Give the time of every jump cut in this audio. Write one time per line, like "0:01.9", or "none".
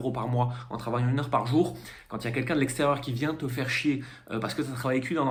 none